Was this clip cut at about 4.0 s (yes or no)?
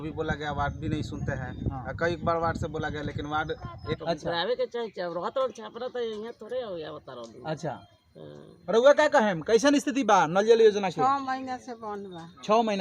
yes